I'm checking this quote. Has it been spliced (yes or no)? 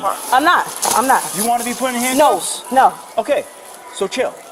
no